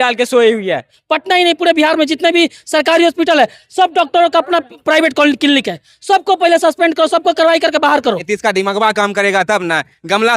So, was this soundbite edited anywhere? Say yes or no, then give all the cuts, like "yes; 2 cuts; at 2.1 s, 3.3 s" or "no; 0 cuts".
yes; 2 cuts; at 1.0 s, 8.3 s